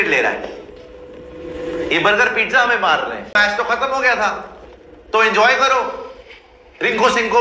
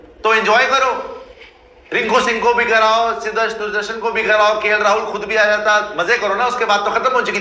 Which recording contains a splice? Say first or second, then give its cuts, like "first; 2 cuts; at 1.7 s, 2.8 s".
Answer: first; 1 cut; at 3.3 s